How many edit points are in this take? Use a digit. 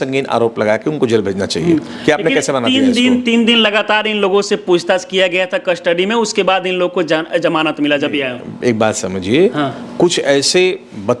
0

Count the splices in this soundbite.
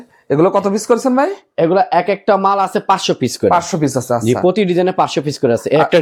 0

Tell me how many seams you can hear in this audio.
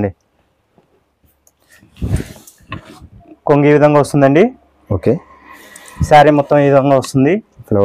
0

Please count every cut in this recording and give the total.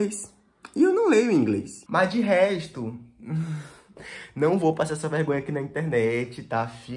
1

